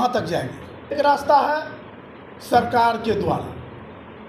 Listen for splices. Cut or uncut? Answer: cut